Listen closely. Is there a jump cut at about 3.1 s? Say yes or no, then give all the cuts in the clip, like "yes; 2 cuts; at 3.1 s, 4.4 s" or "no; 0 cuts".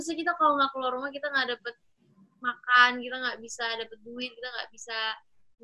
no; 0 cuts